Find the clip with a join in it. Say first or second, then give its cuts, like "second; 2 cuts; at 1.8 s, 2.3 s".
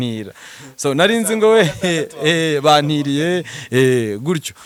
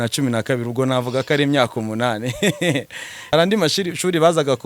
second; 1 cut; at 3.3 s